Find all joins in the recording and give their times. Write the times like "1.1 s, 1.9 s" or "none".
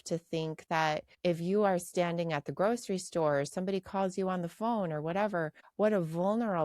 1.1 s, 5.6 s